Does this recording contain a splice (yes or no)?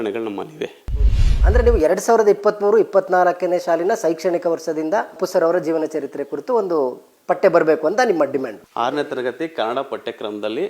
yes